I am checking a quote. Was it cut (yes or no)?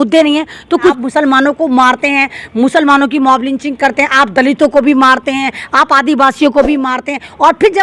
yes